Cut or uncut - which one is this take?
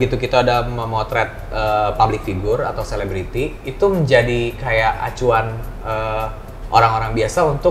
uncut